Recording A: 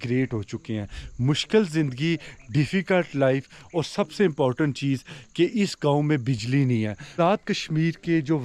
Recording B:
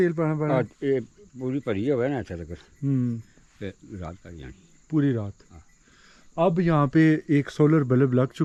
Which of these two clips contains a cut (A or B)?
A